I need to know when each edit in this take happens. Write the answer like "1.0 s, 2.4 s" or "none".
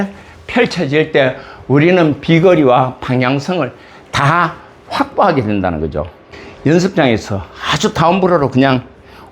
6.2 s